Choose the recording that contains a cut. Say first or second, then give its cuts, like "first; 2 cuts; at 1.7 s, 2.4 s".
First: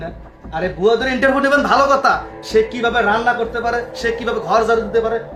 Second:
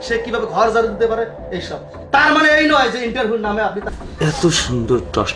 second; 1 cut; at 3.9 s